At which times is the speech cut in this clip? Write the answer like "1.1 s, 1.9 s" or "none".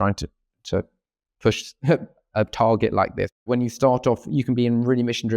3.4 s

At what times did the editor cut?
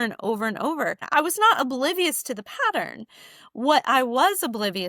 1.0 s

